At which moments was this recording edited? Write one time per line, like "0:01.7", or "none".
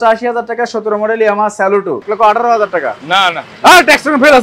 0:02.0